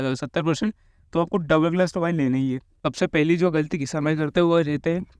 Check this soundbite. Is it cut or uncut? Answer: cut